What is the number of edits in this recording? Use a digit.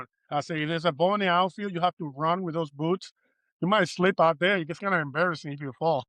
0